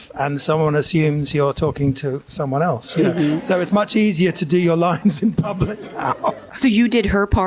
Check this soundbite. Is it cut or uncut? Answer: cut